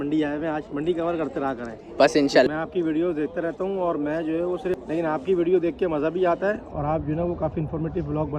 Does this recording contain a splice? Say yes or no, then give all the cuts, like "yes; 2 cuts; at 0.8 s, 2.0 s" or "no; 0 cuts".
yes; 2 cuts; at 2.5 s, 4.7 s